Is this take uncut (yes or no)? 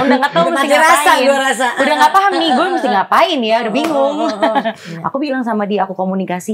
no